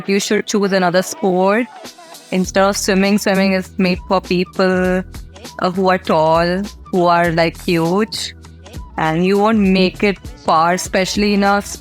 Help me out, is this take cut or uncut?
uncut